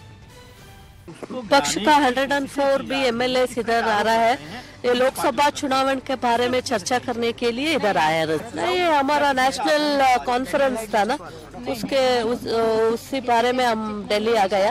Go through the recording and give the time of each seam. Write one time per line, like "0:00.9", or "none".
0:01.3